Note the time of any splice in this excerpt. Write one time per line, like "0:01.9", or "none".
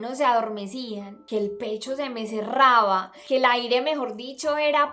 0:01.1
0:03.1